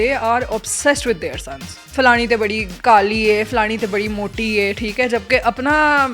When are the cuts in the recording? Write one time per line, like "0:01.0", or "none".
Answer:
0:01.7
0:02.7